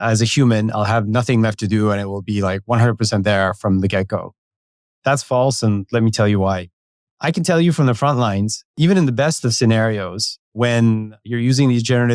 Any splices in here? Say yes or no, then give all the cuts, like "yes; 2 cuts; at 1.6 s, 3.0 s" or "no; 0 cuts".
yes; 4 cuts; at 7.1 s, 8.7 s, 10.5 s, 11.2 s